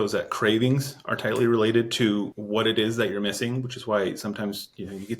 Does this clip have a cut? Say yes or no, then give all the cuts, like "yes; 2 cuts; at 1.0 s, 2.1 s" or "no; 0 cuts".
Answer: yes; 1 cut; at 2.4 s